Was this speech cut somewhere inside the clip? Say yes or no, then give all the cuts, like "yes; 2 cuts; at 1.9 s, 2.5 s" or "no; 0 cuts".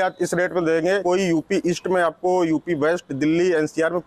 yes; 1 cut; at 1.0 s